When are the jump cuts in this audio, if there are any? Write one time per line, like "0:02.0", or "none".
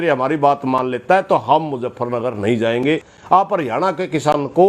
0:03.1